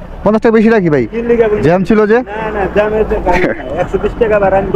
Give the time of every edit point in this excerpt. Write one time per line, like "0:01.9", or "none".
none